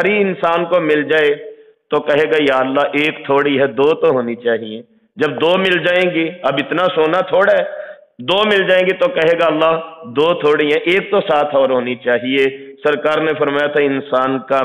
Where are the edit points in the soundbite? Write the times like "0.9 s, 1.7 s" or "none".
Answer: none